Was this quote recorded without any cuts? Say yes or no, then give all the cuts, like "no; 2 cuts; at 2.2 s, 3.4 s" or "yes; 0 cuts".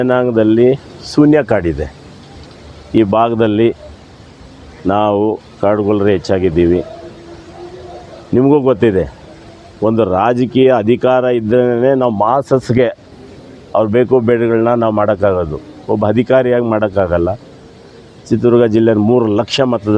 yes; 0 cuts